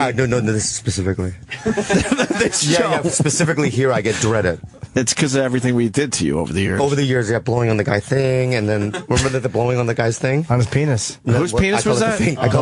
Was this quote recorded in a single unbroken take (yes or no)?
no